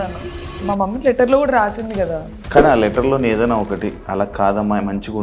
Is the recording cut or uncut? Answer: cut